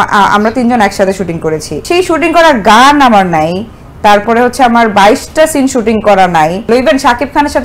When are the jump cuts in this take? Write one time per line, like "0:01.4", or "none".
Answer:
0:01.7
0:06.6